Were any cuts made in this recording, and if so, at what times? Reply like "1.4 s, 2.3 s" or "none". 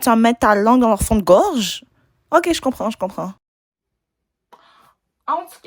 none